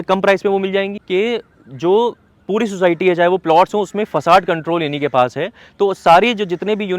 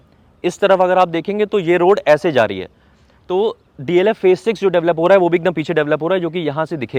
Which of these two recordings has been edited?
first; 1 cut; at 1.0 s

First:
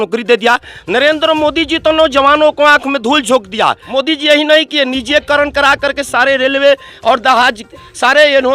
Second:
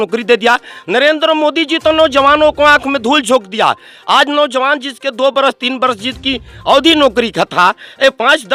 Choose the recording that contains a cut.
first; 1 cut; at 3.8 s

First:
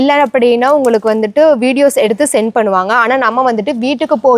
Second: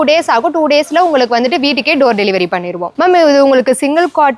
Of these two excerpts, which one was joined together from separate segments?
second; 1 cut; at 2.9 s

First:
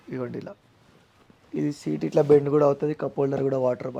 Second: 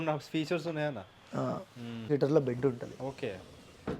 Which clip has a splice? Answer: second; 1 cut; at 2.1 s

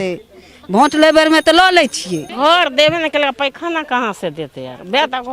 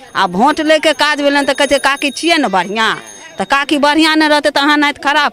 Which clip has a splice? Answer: first; 1 cut; at 2.3 s

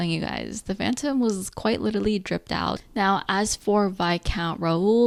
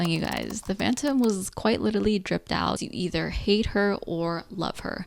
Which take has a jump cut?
second; 1 cut; at 2.8 s

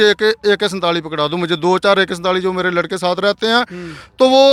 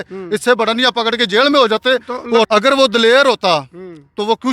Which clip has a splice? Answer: second; 1 cut; at 2.5 s

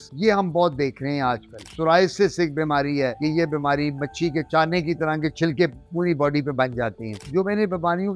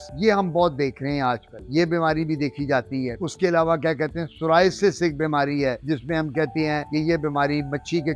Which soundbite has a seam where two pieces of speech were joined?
first; 3 cuts; at 1.6 s, 3.2 s, 7.2 s

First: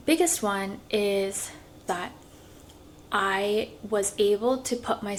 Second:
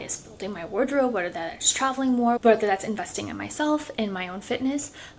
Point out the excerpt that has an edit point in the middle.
second; 1 cut; at 2.4 s

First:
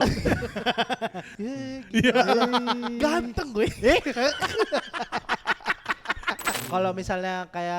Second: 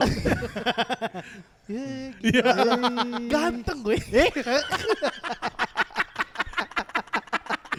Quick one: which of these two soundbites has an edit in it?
first; 2 cuts; at 1.3 s, 6.6 s

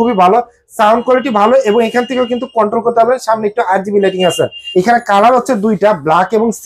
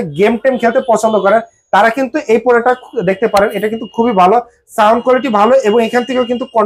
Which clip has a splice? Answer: first; 1 cut; at 4.6 s

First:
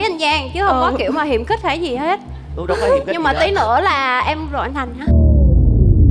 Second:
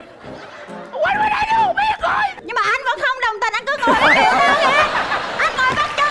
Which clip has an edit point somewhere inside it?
second; 1 cut; at 2.4 s

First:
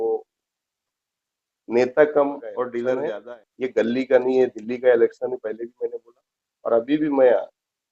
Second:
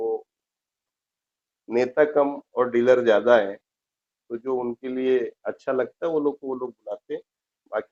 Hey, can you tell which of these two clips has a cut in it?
first; 1 cut; at 2.9 s

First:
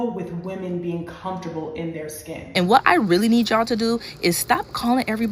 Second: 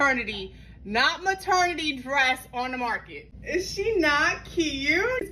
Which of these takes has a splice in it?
first; 1 cut; at 2.4 s

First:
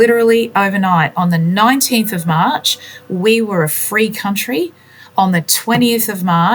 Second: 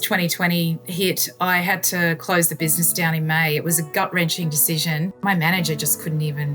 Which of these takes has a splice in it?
second; 2 cuts; at 0.9 s, 5.2 s

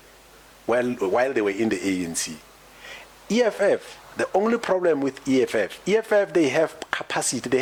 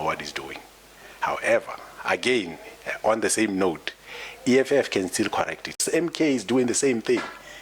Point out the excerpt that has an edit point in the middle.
second; 1 cut; at 5.8 s

